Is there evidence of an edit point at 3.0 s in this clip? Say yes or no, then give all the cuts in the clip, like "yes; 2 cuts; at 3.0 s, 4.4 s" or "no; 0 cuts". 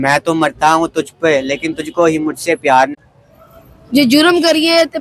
yes; 1 cut; at 3.0 s